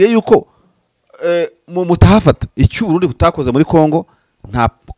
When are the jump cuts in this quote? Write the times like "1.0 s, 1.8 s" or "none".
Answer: 2.5 s